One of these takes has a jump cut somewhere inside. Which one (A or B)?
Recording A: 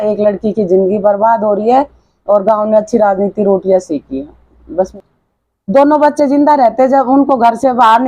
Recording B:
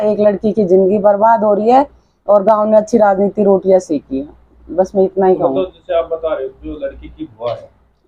A